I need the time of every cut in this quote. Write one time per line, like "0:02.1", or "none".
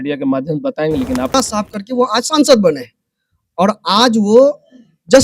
0:01.3